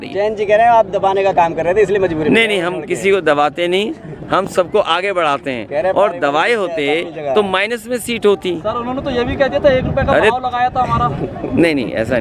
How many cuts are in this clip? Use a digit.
0